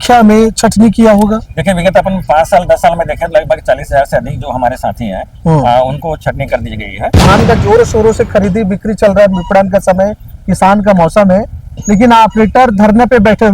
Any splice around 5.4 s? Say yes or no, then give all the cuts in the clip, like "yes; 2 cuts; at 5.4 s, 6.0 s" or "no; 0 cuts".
no; 1 cut; at 7.2 s